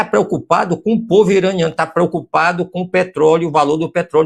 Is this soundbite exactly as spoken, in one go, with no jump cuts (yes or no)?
yes